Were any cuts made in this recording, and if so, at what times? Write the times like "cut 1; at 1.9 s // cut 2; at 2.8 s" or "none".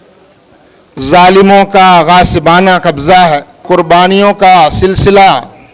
cut 1; at 3.6 s

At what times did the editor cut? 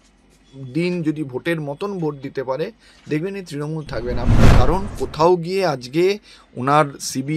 cut 1; at 4.5 s

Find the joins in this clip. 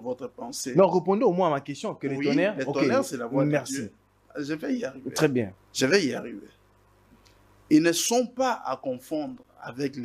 cut 1; at 5.6 s

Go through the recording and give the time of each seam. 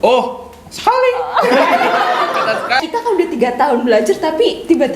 cut 1; at 2.8 s

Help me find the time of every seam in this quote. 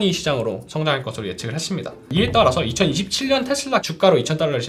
cut 1; at 2.1 s // cut 2; at 3.9 s

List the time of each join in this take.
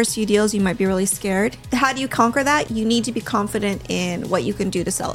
cut 1; at 1.6 s // cut 2; at 2.6 s

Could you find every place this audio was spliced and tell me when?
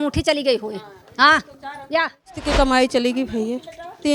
cut 1; at 2.3 s

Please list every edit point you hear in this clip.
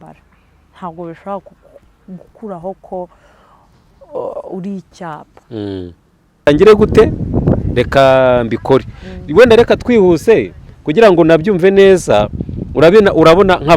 cut 1; at 6.4 s

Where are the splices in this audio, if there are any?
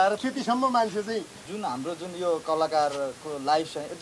cut 1; at 1.4 s

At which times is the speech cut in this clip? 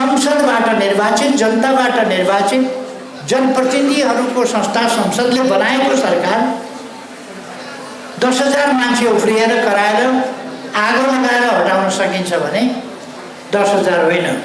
none

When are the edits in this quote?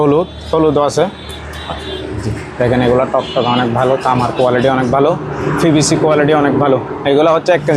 none

